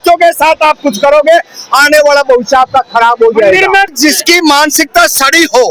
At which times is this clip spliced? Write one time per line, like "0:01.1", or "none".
0:03.9